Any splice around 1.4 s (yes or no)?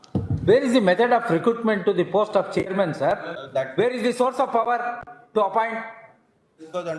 no